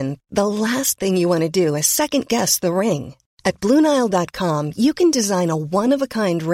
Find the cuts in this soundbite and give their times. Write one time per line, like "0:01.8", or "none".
none